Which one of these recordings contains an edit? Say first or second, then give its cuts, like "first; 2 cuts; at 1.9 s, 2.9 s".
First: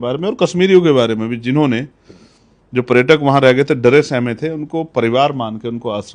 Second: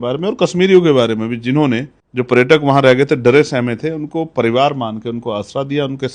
second; 1 cut; at 2.0 s